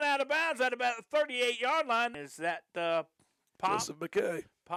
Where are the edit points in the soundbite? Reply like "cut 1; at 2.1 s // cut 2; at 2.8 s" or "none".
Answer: none